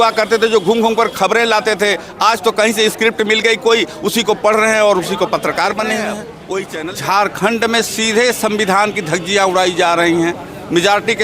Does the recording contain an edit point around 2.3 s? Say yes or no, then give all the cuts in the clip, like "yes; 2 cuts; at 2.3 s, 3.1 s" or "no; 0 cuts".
no; 1 cut; at 6.7 s